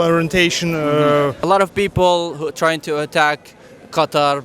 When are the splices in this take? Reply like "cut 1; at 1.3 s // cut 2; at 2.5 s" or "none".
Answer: cut 1; at 1.4 s